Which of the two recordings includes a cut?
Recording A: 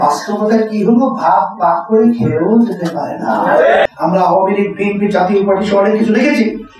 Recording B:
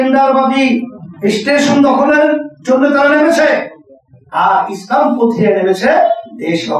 A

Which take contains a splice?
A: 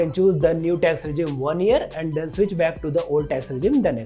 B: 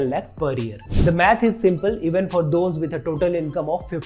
B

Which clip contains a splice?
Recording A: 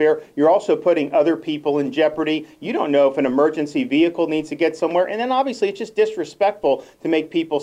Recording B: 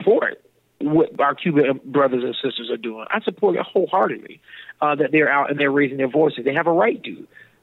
B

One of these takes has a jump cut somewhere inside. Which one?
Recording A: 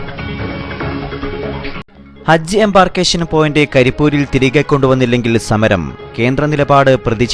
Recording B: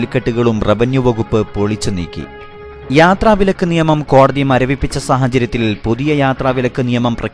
A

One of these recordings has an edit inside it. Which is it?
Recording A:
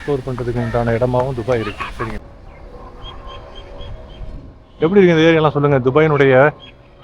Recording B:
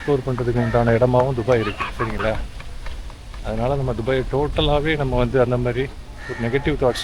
A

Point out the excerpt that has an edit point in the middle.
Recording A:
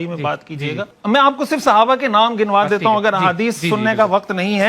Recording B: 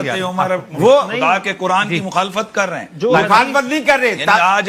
A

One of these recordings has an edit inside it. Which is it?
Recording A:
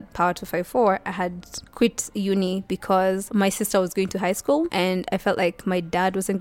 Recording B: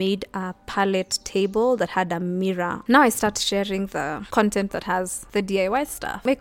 B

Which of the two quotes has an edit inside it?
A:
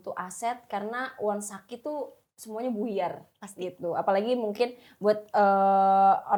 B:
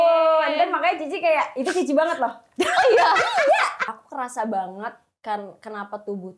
B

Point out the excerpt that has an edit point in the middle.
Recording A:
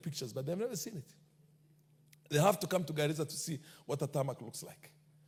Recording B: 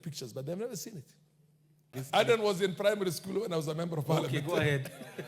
B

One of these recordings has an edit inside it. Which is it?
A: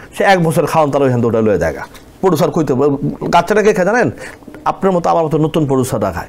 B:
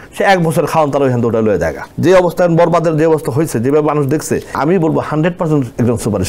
B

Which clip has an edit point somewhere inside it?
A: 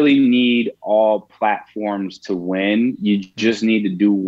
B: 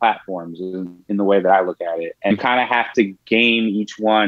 B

